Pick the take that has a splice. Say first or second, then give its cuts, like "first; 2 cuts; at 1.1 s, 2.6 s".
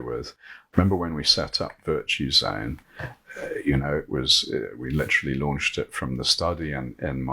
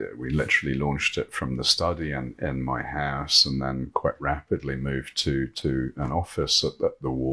first; 1 cut; at 3.2 s